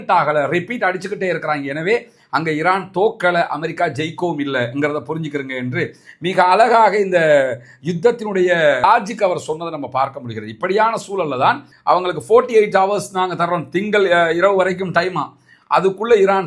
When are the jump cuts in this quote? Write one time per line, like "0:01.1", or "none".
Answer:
0:11.7